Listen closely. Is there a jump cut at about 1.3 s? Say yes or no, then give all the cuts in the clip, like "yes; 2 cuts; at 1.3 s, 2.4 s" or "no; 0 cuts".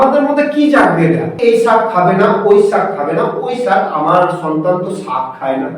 yes; 1 cut; at 1.3 s